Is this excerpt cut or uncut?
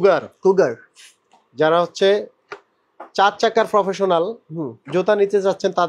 uncut